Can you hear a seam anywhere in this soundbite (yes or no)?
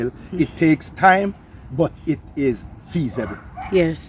no